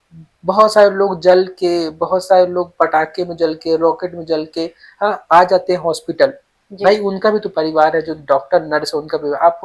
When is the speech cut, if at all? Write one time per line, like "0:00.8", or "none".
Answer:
none